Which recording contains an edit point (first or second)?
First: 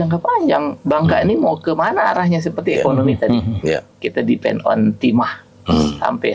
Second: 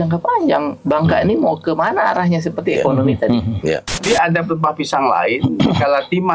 second